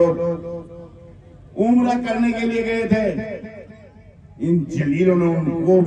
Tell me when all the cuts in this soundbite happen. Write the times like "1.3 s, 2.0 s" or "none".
none